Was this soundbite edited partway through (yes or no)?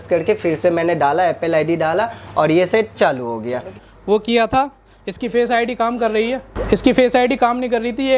yes